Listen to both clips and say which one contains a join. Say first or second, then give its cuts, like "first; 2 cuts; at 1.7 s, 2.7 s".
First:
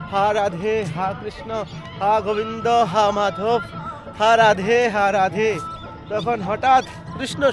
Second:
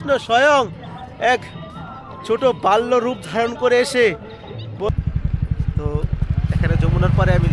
second; 1 cut; at 4.9 s